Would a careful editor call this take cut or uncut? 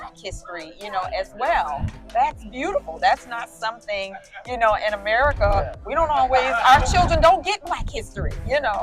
uncut